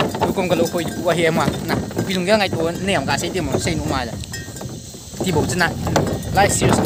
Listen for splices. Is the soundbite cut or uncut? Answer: uncut